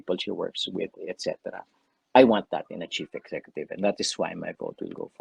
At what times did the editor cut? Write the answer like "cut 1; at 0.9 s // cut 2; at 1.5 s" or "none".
none